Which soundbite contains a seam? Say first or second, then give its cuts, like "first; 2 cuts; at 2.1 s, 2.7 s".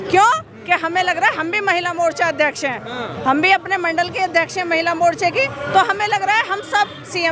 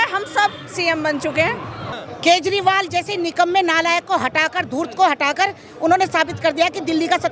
second; 1 cut; at 1.9 s